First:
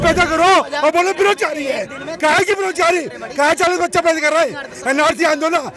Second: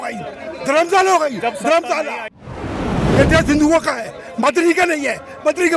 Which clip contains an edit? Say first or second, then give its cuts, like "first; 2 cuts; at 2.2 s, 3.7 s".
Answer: second; 1 cut; at 2.8 s